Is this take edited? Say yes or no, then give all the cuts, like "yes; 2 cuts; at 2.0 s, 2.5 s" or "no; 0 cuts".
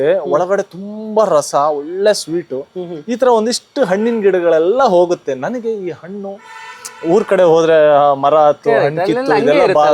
no; 0 cuts